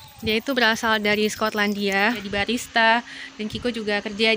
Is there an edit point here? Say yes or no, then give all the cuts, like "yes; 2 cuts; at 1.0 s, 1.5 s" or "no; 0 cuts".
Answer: yes; 1 cut; at 2.2 s